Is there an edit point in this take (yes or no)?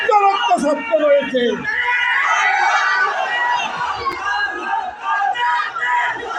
no